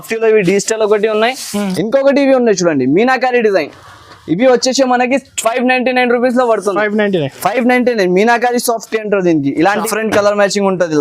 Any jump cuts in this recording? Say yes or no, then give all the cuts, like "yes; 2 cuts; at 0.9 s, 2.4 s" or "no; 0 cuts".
yes; 2 cuts; at 1.7 s, 9.8 s